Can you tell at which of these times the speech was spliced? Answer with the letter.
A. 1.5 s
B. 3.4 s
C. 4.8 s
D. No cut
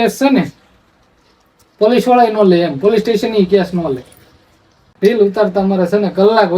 C